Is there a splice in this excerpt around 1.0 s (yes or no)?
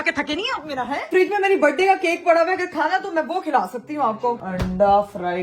yes